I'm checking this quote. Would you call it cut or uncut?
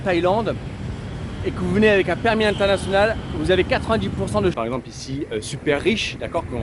cut